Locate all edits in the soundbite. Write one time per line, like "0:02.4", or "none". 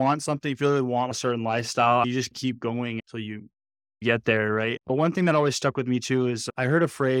0:01.1
0:04.0